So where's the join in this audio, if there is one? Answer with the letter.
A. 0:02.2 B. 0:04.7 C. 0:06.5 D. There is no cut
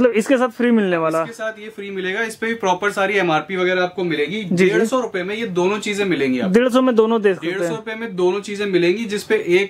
D